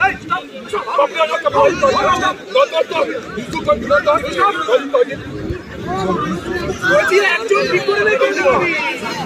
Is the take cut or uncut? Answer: uncut